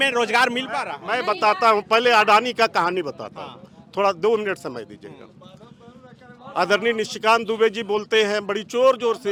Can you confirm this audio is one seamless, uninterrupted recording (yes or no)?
yes